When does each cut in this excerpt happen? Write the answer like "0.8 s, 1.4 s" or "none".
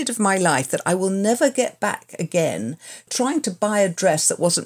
3.0 s